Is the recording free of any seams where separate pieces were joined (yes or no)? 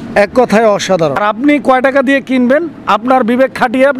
no